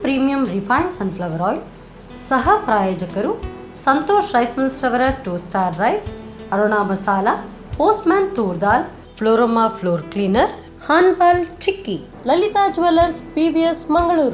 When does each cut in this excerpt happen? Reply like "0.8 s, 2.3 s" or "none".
none